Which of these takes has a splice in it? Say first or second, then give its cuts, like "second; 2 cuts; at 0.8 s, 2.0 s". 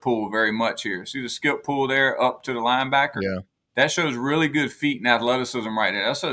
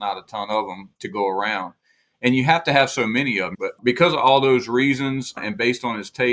second; 3 cuts; at 0.9 s, 3.7 s, 5.4 s